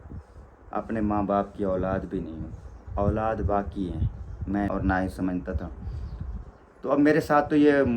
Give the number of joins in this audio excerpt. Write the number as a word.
one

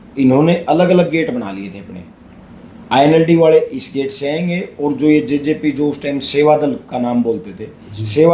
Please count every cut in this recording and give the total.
zero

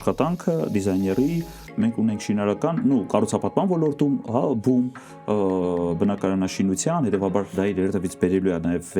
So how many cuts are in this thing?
zero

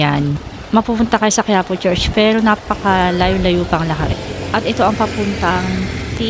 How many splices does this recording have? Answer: zero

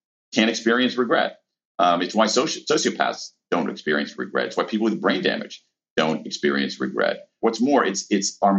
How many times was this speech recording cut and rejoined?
one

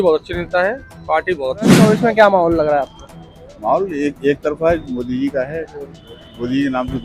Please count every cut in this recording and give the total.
one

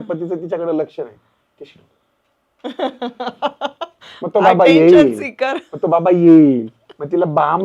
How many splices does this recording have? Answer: zero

